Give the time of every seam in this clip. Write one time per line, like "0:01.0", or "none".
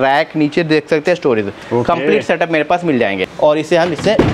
0:03.3